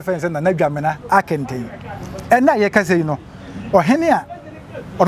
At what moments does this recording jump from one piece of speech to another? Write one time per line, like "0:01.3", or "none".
none